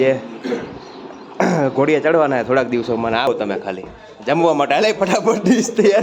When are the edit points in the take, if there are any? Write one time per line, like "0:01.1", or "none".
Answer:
0:03.3

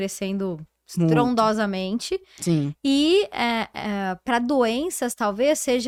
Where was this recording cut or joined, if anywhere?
none

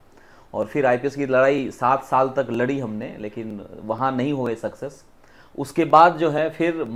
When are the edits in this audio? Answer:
none

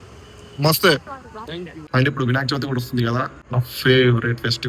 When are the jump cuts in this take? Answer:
0:01.8
0:03.4

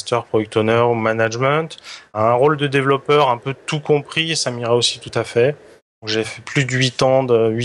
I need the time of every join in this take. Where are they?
0:02.1
0:06.0

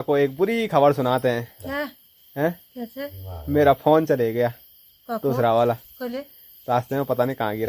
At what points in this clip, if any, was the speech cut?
none

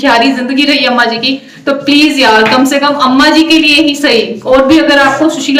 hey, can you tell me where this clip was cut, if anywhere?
none

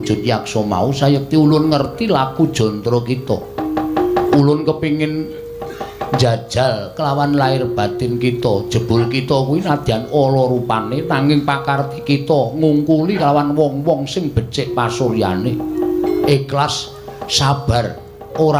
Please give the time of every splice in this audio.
none

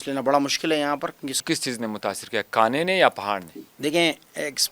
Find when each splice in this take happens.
0:01.4

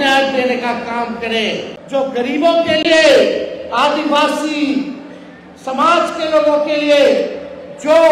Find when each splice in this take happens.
0:01.7

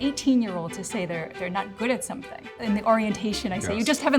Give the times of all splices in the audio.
0:02.5

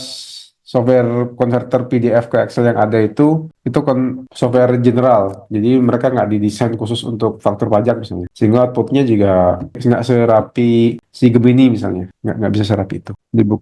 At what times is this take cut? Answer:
none

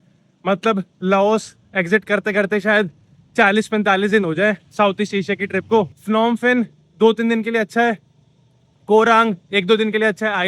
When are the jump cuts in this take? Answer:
0:06.0

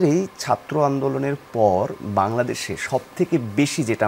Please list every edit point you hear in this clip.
none

